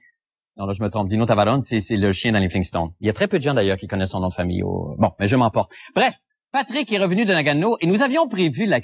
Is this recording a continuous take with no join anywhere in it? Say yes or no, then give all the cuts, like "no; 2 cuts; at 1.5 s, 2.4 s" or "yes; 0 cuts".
yes; 0 cuts